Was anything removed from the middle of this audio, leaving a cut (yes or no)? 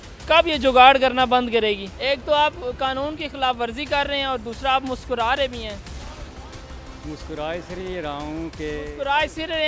yes